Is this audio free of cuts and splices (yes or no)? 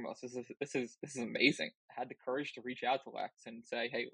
no